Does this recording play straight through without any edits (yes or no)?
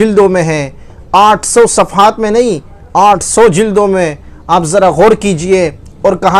yes